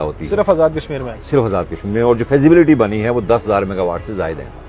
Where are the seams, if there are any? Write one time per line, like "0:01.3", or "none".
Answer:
none